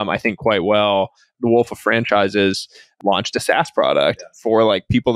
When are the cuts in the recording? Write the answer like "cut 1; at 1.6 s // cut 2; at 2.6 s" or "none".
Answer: cut 1; at 1.3 s // cut 2; at 2.9 s